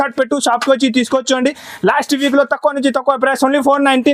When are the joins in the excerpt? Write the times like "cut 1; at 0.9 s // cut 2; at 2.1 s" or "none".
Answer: none